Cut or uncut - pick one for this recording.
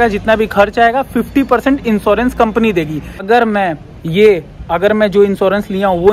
cut